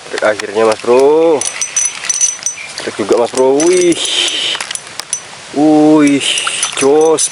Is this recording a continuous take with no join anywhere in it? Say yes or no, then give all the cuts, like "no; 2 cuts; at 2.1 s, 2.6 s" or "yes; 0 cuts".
yes; 0 cuts